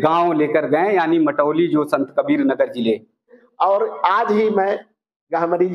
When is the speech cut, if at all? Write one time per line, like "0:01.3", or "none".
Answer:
0:03.4